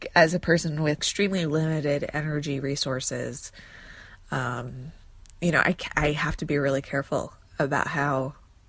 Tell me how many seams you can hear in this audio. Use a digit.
1